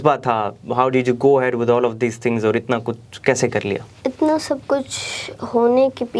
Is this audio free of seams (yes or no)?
no